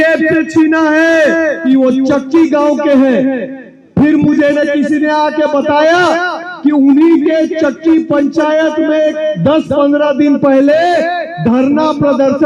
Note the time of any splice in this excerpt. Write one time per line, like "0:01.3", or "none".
0:01.6